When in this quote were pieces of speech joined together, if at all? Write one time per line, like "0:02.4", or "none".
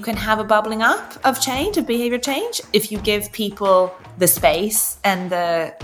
0:01.1
0:04.0